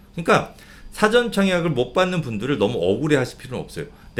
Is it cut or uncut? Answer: uncut